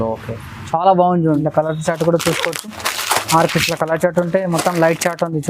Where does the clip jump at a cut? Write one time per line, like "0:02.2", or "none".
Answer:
0:01.4

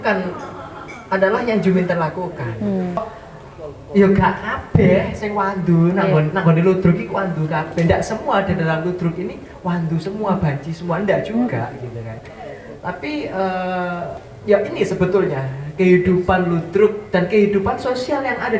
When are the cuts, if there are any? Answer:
0:03.0
0:14.3

